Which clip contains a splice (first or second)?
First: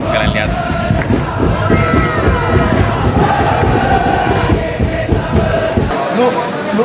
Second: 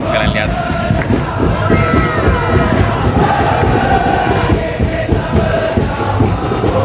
first